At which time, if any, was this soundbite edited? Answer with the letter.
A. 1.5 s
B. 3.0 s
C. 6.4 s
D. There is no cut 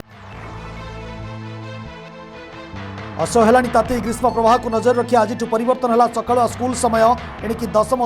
A